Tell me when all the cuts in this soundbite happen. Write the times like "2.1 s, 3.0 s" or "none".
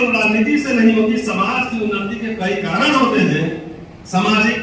none

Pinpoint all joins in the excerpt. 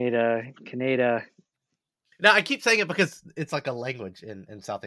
none

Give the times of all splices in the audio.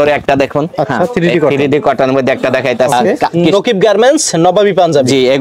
3.1 s

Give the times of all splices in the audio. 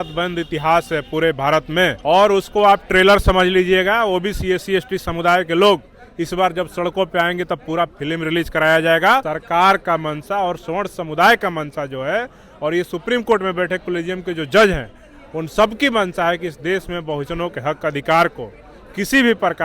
2.0 s, 9.3 s

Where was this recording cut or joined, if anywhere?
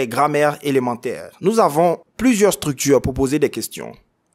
1.3 s, 2.1 s

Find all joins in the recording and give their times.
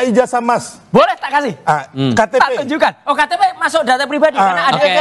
none

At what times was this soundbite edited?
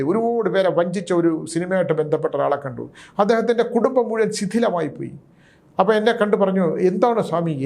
none

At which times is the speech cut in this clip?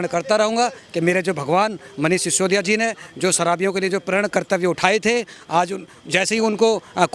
none

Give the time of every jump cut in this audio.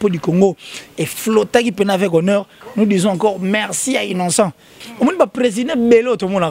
4.7 s

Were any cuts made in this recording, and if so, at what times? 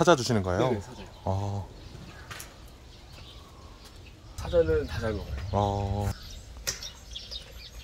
4.4 s, 6.2 s

